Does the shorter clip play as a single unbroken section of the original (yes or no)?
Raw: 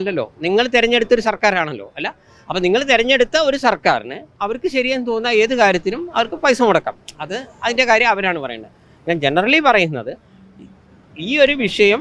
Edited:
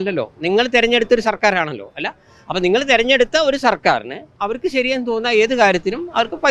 yes